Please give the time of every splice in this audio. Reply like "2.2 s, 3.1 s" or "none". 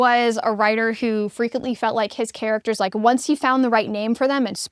none